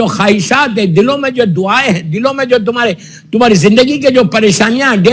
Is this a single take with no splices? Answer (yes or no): yes